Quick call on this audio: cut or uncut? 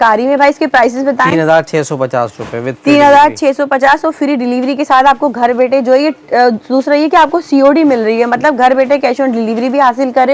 uncut